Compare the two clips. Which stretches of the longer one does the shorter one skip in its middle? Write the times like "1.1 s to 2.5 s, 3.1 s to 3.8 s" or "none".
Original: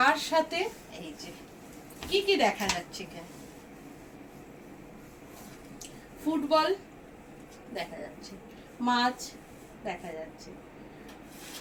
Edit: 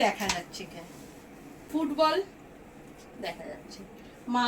4.1 s to 6.2 s